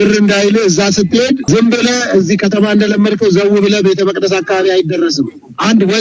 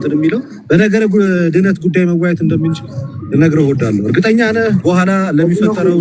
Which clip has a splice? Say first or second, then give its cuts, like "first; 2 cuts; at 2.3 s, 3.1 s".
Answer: first; 1 cut; at 1.4 s